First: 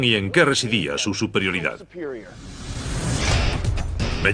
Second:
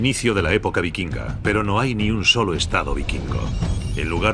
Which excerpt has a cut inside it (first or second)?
second